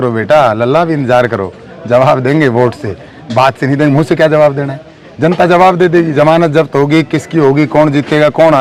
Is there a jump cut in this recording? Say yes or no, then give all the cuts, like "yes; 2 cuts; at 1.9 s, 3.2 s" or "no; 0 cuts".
no; 0 cuts